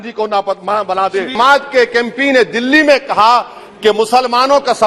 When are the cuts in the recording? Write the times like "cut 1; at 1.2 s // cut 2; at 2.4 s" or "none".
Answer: cut 1; at 1.4 s